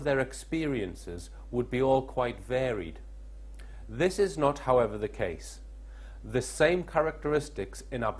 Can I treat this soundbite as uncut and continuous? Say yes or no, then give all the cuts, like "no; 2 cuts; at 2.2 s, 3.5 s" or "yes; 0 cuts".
no; 1 cut; at 5.1 s